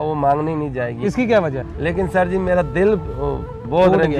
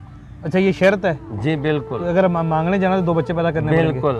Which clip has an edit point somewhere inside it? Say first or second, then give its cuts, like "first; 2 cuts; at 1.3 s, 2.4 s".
first; 1 cut; at 1.7 s